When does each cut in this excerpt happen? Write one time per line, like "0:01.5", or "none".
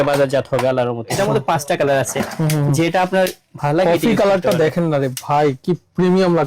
0:01.2